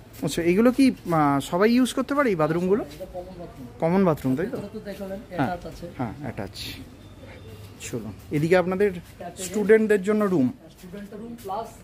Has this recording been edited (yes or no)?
no